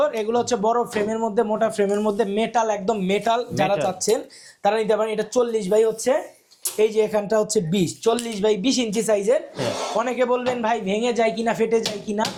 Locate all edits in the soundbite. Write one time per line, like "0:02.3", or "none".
none